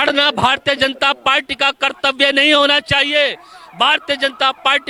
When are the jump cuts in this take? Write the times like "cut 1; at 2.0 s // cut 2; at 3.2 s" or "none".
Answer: none